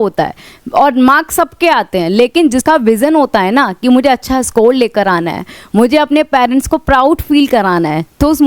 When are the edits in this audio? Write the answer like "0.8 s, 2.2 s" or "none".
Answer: 2.6 s

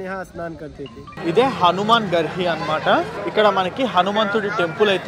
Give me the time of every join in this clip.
1.1 s

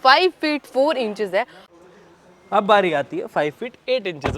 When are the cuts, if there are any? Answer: 1.6 s

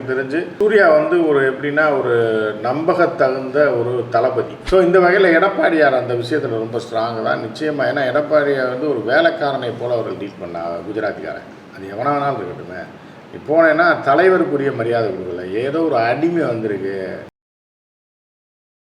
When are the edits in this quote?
4.6 s

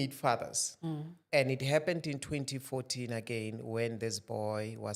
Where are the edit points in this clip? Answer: 1.2 s

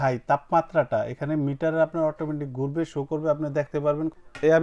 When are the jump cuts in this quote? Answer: 3.7 s

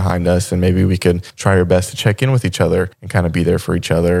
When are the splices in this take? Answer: 1.3 s, 3.0 s

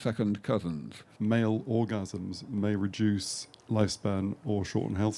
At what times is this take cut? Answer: 1.1 s

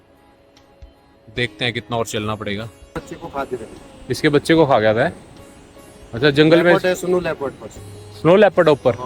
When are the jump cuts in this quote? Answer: 2.9 s

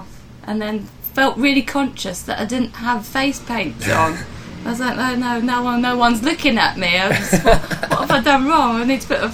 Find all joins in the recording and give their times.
none

